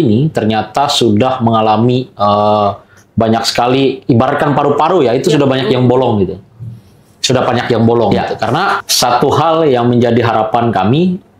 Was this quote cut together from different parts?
yes; 1 cut; at 8.9 s

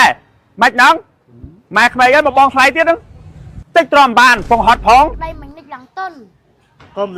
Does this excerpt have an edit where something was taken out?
yes; 1 cut; at 5.2 s

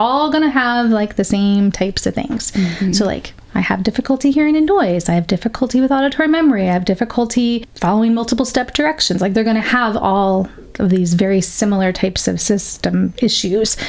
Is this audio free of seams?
no; 1 cut; at 7.7 s

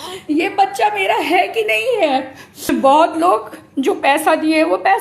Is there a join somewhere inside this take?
yes; 1 cut; at 2.7 s

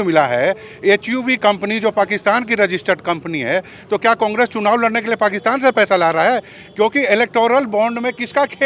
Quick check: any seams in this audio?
no; 0 cuts

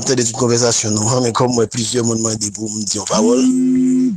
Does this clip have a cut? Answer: no; 0 cuts

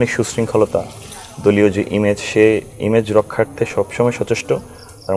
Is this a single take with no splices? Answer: yes; 0 cuts

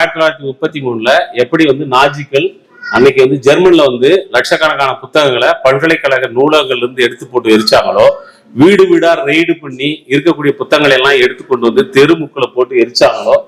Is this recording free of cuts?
yes; 0 cuts

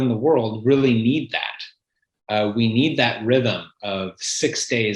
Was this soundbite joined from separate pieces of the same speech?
no; 0 cuts

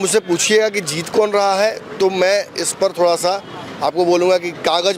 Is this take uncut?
yes; 0 cuts

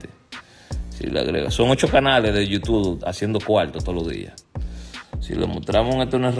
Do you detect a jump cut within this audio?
no; 0 cuts

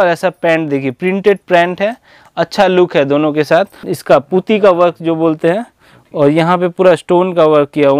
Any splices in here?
yes; 1 cut; at 3.9 s

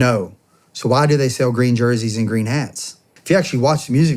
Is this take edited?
yes; 1 cut; at 3.1 s

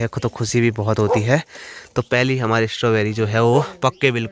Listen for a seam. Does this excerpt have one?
no; 0 cuts

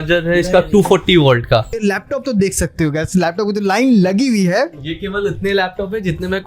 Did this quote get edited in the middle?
yes; 1 cut; at 1.8 s

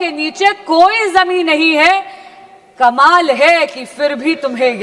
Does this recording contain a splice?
no; 0 cuts

